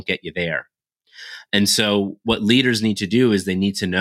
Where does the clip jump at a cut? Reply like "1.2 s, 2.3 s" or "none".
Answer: none